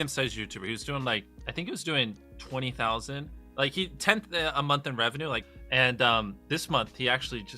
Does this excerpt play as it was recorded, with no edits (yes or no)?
no